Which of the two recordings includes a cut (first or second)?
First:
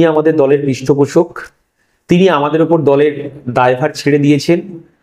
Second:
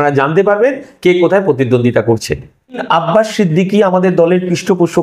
second